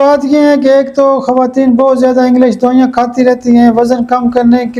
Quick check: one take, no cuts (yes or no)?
yes